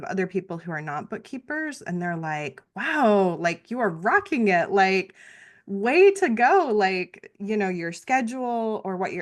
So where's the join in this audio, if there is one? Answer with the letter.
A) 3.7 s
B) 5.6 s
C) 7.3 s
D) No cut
D